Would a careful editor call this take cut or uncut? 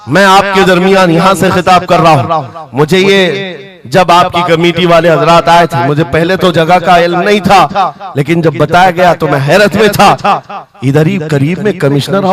uncut